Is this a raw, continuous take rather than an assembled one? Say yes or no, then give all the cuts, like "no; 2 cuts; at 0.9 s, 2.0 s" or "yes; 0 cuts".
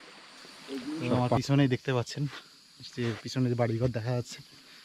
no; 1 cut; at 1.2 s